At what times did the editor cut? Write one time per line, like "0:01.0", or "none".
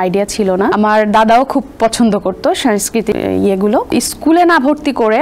0:00.7
0:03.1
0:03.9